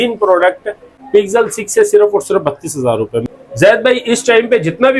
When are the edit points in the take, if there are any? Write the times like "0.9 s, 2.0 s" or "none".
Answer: 0.9 s, 3.2 s